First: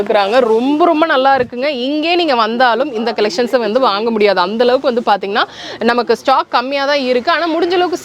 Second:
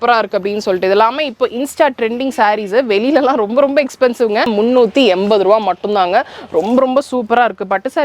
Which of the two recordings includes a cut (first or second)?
second